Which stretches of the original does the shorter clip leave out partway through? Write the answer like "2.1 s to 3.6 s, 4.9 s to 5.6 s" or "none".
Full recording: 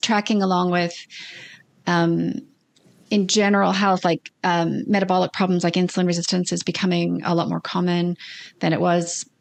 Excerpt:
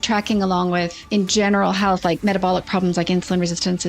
1.0 s to 3.0 s, 4.2 s to 4.9 s